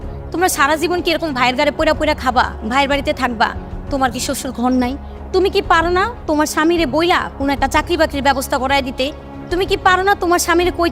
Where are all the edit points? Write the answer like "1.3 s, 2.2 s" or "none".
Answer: none